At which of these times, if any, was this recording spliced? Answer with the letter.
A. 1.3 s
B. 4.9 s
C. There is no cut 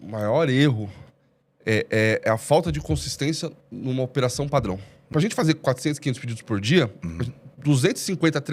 B